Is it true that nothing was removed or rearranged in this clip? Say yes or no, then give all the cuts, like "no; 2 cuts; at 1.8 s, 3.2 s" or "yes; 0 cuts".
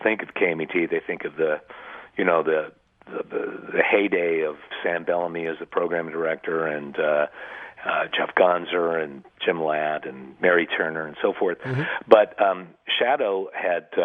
yes; 0 cuts